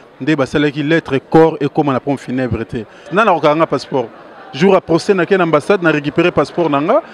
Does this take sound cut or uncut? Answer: cut